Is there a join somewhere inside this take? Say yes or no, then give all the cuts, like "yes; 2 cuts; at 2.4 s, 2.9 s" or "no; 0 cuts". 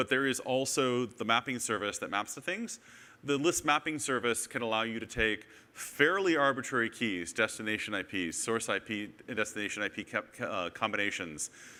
no; 0 cuts